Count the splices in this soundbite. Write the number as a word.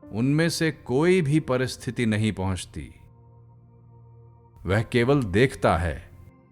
two